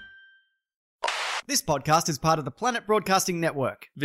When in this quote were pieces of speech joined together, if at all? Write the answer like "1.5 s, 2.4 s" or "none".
1.1 s